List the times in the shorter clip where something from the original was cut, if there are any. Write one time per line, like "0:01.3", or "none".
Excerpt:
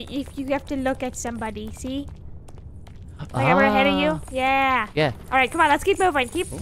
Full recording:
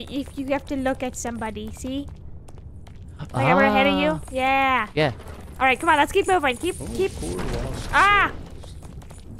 0:05.2